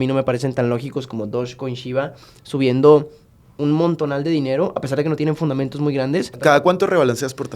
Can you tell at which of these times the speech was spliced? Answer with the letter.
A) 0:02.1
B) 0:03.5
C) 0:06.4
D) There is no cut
C